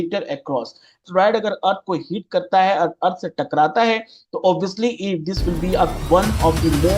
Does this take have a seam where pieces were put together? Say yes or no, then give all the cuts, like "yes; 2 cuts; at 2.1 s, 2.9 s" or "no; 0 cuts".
yes; 1 cut; at 1.0 s